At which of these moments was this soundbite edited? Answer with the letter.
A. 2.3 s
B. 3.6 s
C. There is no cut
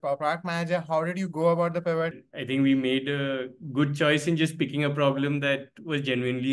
A